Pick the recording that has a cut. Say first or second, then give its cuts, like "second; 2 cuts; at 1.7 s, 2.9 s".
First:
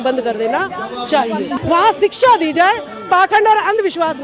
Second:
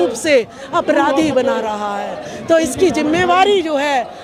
first; 1 cut; at 1.5 s